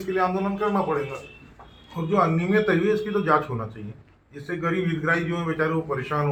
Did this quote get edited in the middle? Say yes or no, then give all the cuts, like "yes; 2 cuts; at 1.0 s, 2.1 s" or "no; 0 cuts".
no; 0 cuts